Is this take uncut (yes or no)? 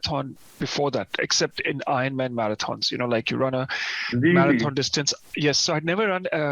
yes